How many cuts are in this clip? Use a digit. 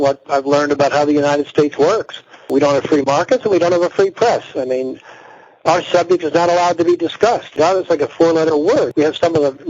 1